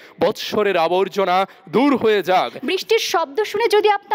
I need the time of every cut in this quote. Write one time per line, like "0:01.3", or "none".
0:02.6

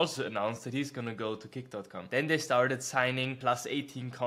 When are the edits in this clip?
0:02.0
0:03.4

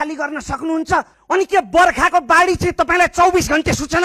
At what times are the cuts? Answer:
0:01.1

